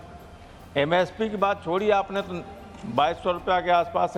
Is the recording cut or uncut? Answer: uncut